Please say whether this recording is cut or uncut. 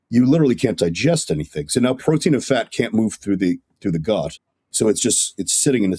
uncut